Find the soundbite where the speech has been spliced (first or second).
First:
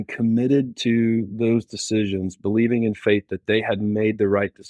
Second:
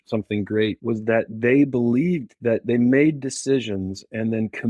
second